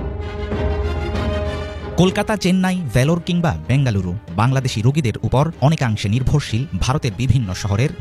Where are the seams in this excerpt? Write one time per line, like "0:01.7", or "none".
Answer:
none